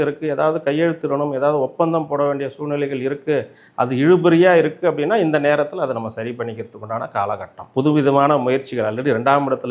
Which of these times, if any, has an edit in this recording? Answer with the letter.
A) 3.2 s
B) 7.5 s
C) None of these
B